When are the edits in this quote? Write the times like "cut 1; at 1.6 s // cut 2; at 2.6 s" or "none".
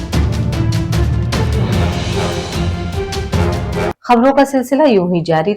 cut 1; at 4.0 s